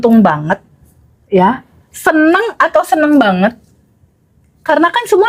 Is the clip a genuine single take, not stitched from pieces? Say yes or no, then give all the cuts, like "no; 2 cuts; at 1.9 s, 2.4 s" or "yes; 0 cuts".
yes; 0 cuts